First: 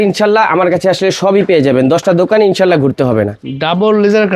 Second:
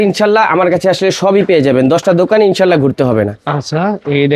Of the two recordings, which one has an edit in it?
first; 1 cut; at 3.4 s

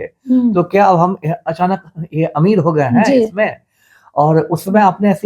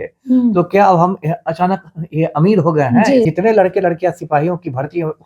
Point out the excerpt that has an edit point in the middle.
second; 1 cut; at 3.3 s

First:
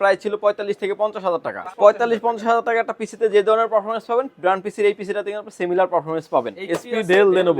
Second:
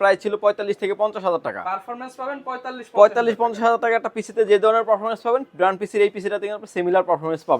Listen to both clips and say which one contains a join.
first; 2 cuts; at 1.6 s, 6.6 s

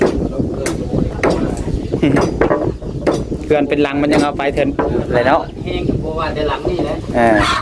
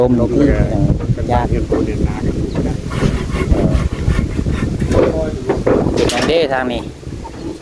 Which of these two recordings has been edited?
second; 1 cut; at 5.8 s

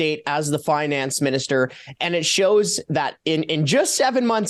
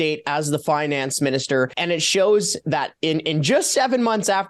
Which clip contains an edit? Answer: second; 1 cut; at 1.8 s

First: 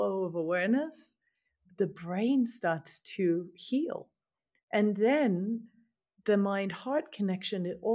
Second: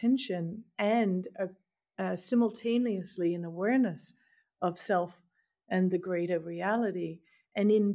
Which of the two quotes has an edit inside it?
first; 1 cut; at 1.6 s

